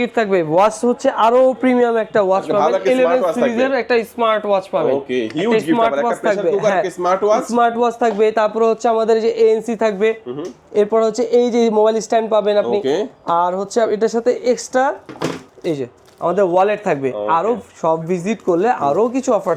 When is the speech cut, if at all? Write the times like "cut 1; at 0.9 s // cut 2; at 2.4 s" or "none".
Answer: none

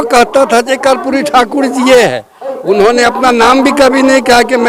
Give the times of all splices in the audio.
none

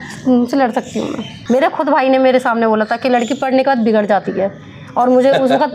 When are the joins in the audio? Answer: cut 1; at 1.3 s

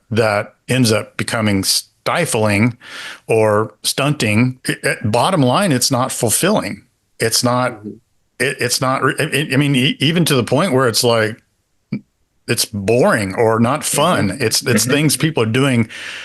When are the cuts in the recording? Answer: cut 1; at 4.6 s

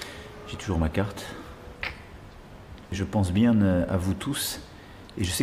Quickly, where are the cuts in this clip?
cut 1; at 2.9 s

